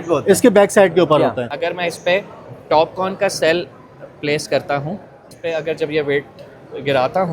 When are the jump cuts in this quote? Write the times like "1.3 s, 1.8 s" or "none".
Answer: 1.5 s, 5.3 s